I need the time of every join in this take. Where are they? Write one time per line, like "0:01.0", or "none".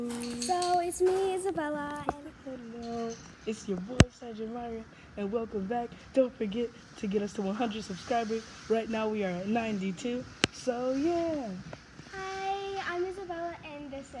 0:02.0